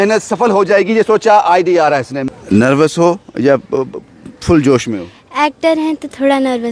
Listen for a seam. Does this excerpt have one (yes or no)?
yes